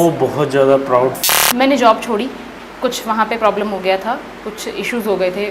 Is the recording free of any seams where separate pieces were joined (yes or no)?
no